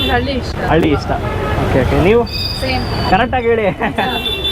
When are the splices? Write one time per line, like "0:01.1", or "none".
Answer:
none